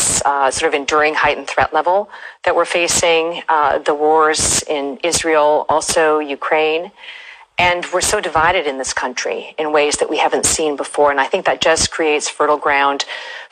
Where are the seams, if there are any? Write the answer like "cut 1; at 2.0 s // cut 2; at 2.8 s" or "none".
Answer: none